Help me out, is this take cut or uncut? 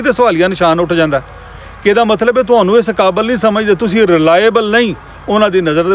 uncut